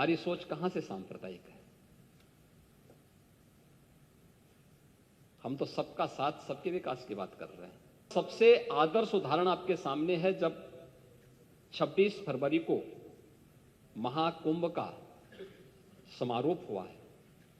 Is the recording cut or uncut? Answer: cut